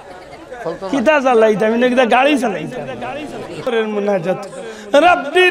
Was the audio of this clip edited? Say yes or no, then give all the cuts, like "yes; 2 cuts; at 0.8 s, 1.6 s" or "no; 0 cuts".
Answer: yes; 1 cut; at 3.7 s